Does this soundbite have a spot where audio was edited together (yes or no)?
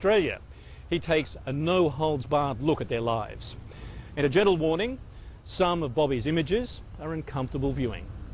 yes